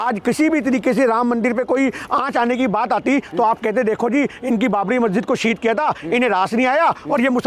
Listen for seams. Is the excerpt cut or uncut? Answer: uncut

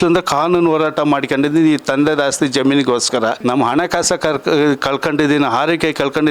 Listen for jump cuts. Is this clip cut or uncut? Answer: cut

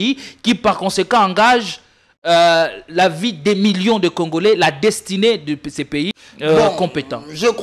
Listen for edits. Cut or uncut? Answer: cut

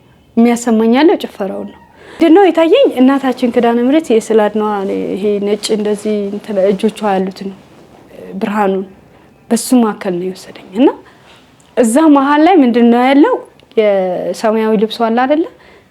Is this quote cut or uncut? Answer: cut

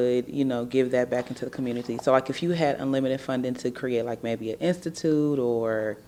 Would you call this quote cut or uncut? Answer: uncut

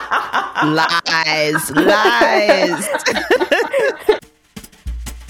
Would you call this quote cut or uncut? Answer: cut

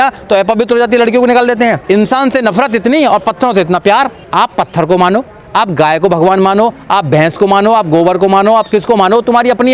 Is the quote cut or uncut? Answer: cut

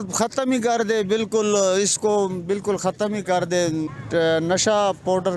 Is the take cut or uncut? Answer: cut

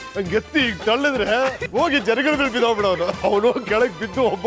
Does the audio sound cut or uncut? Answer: uncut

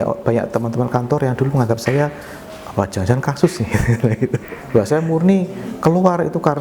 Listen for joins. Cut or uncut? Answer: cut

